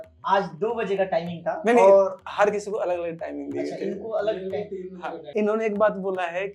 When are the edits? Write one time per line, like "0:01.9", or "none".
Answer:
0:05.3